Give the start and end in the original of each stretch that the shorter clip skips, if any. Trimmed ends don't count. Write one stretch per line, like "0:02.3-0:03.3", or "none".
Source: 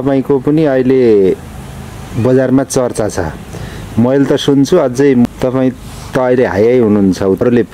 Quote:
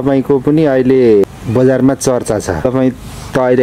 0:01.2-0:01.9
0:03.3-0:05.4